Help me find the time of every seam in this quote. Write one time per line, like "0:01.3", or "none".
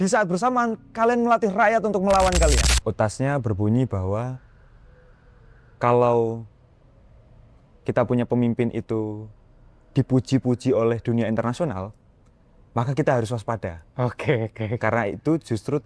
0:02.7